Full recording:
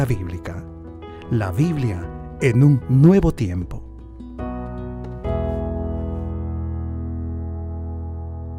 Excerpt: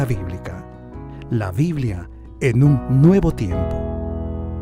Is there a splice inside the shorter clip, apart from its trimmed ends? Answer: yes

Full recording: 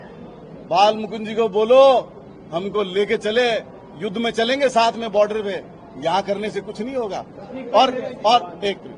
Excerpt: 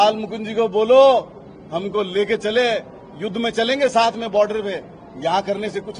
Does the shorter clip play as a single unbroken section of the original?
yes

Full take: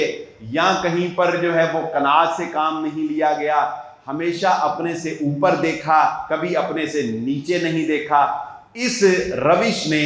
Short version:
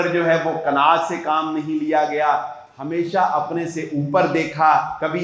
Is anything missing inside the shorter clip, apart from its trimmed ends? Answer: no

